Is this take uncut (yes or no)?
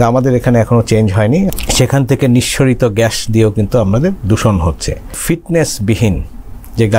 no